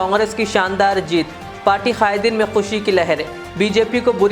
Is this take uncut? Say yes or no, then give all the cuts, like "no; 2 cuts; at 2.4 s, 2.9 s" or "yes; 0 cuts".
yes; 0 cuts